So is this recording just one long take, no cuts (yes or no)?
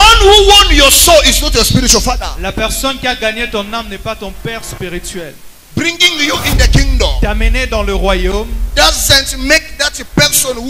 no